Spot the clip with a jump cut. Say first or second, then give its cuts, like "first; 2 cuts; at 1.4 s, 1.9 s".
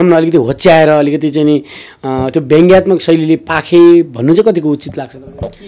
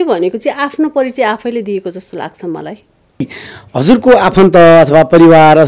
second; 1 cut; at 3.4 s